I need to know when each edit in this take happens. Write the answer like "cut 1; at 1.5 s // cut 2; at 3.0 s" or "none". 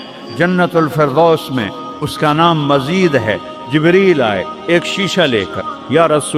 none